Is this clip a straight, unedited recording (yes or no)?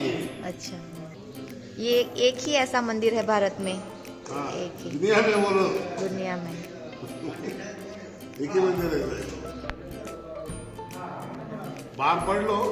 no